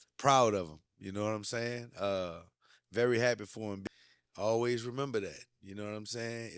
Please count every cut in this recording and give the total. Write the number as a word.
one